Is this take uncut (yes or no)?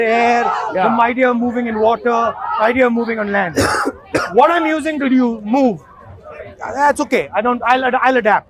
yes